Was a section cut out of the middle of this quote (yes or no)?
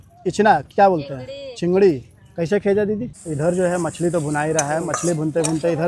yes